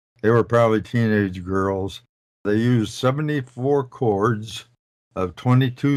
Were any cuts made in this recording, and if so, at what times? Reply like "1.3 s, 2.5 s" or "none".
none

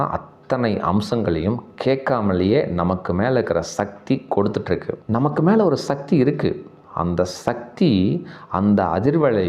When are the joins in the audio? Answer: 4.9 s

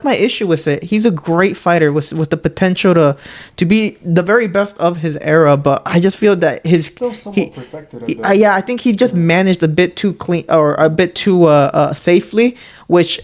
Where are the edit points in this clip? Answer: none

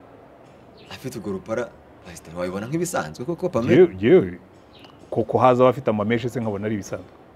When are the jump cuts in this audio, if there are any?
none

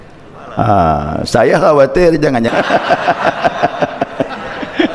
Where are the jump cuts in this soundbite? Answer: 2.5 s

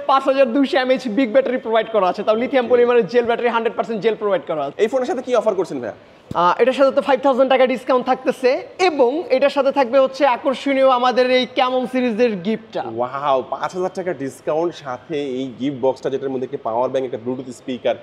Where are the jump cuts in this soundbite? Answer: 4.7 s

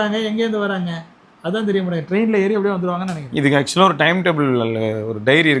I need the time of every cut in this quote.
none

